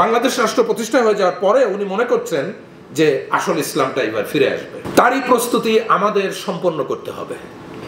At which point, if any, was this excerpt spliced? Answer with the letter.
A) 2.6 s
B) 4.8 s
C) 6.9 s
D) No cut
D